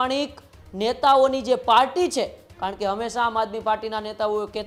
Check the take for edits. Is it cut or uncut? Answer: uncut